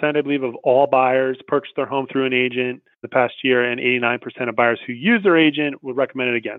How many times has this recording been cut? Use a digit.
1